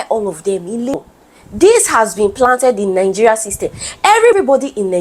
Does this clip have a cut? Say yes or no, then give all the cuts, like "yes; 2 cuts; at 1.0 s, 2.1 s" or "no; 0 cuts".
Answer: yes; 1 cut; at 1.0 s